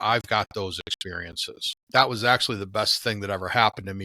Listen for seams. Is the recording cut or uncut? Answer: cut